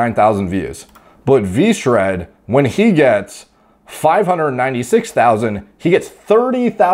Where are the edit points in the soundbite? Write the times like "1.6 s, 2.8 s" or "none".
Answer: none